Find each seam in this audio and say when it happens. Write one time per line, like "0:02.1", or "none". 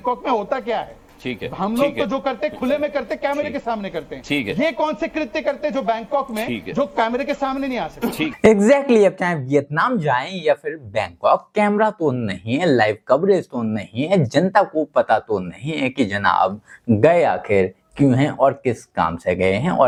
none